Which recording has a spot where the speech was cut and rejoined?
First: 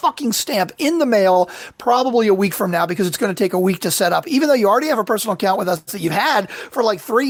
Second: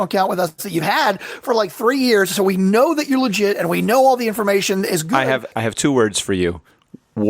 second; 1 cut; at 5.5 s

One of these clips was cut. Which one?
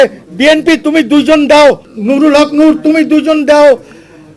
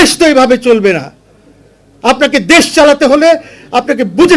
first; 1 cut; at 1.9 s

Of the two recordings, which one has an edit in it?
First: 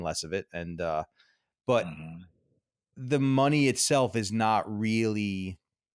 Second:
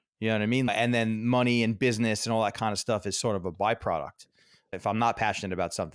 second; 2 cuts; at 0.7 s, 4.7 s

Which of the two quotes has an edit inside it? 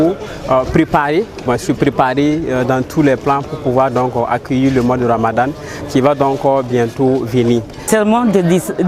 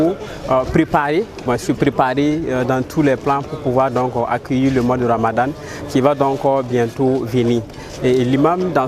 first; 1 cut; at 7.9 s

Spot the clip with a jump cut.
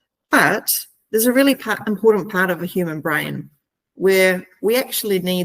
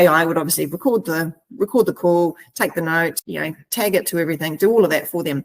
second; 1 cut; at 3.2 s

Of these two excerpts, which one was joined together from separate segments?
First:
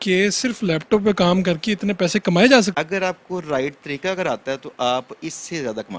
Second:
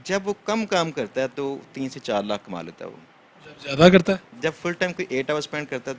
first; 1 cut; at 2.7 s

